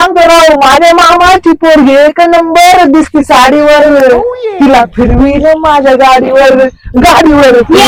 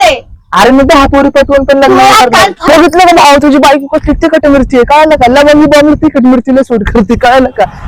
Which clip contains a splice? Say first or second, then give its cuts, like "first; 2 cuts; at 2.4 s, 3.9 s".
second; 1 cut; at 2.6 s